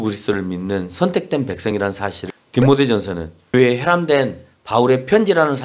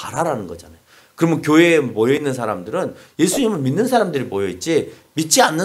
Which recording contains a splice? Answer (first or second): first